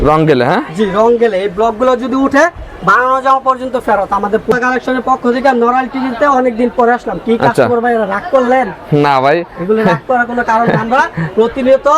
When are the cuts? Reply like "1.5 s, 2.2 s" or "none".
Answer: 4.5 s